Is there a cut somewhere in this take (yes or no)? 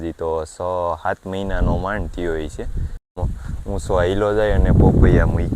yes